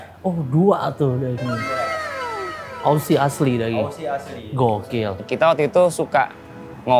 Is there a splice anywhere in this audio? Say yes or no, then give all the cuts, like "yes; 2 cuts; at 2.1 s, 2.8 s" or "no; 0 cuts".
yes; 1 cut; at 5.2 s